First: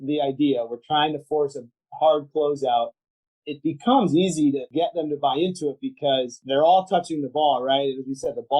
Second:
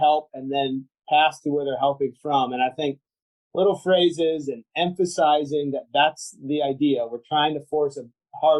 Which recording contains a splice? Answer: first; 3 cuts; at 3.4 s, 4.7 s, 6.4 s

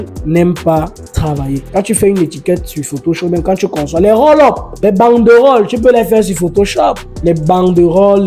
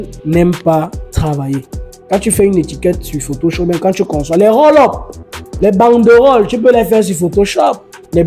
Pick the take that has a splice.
first; 3 cuts; at 1.6 s, 4.7 s, 7.1 s

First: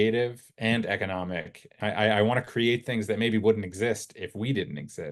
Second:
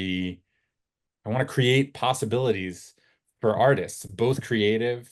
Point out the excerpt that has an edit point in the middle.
first; 1 cut; at 1.8 s

